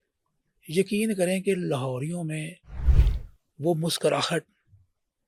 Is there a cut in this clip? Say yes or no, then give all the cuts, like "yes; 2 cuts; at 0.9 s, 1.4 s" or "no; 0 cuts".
no; 0 cuts